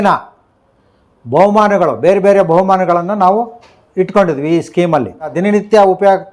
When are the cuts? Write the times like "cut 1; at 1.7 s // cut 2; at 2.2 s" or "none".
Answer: cut 1; at 5.4 s